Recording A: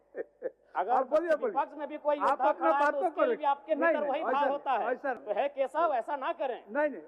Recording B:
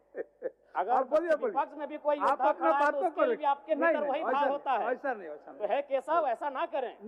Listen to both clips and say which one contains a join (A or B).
A